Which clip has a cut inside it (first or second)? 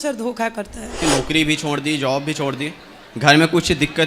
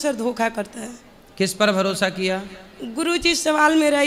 first